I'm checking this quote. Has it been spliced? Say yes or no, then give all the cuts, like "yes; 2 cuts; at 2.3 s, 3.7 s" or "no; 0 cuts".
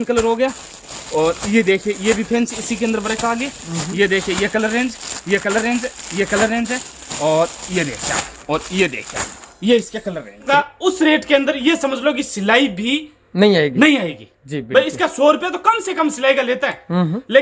yes; 1 cut; at 10.5 s